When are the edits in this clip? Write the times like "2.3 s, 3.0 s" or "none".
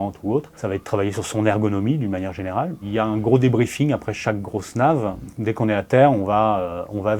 2.8 s, 5.3 s